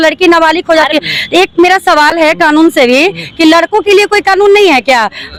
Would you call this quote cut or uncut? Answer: uncut